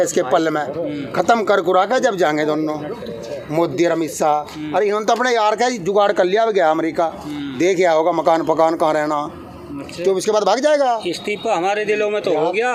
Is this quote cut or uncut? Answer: uncut